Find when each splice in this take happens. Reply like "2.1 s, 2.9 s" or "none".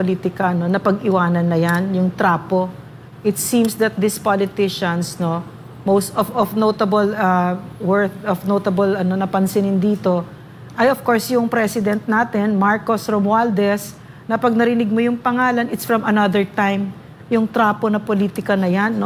none